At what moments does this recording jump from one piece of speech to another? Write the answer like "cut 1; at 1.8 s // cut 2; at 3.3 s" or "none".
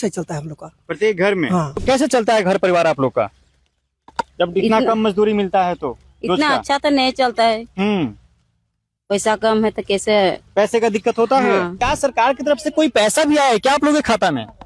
cut 1; at 1.8 s // cut 2; at 11.8 s